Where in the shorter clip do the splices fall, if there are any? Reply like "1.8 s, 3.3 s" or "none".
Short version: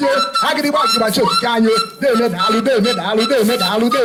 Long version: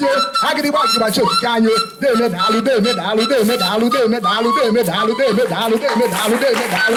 none